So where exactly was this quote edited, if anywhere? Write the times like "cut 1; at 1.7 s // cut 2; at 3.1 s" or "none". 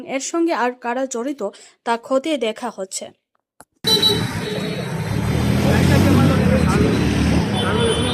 cut 1; at 3.8 s